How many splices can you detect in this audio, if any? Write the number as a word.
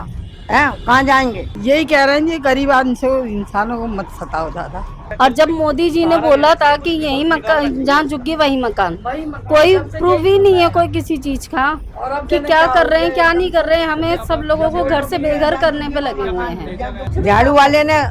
three